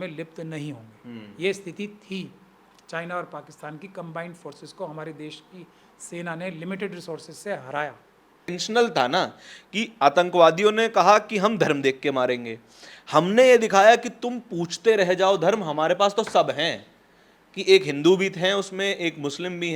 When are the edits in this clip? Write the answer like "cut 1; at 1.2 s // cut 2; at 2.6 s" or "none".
cut 1; at 8.6 s